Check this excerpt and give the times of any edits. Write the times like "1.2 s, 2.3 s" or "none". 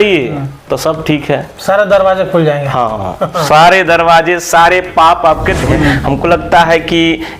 5.7 s